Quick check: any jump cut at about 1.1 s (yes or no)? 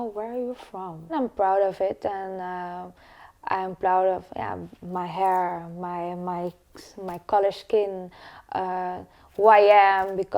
yes